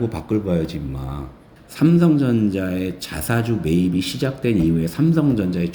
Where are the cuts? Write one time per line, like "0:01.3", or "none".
0:01.4